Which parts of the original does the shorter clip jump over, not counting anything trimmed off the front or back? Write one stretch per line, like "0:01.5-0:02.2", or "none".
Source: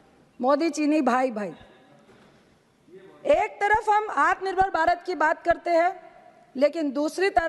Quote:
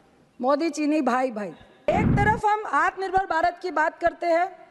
0:01.9-0:03.3